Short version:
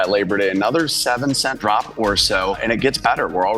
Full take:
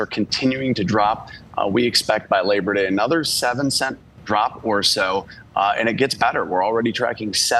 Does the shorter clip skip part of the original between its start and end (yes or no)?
yes